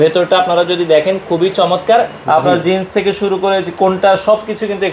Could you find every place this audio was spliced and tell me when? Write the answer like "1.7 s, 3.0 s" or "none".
2.2 s